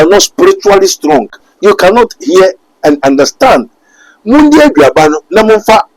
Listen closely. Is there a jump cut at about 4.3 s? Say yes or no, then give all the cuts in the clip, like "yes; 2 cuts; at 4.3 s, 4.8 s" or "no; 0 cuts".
no; 1 cut; at 1.4 s